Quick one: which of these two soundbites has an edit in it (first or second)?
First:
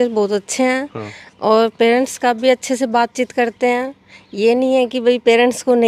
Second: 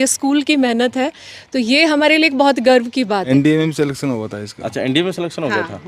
second